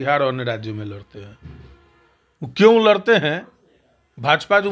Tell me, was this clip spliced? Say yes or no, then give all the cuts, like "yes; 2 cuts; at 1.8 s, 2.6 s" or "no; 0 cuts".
no; 0 cuts